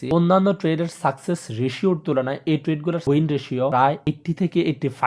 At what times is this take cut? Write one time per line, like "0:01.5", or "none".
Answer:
0:03.8